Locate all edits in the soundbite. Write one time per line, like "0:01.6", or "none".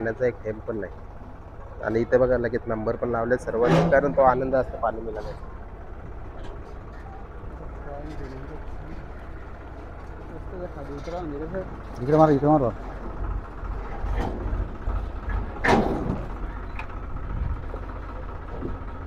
none